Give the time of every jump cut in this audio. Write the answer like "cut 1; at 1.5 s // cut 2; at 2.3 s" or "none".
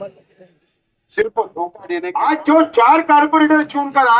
cut 1; at 1.8 s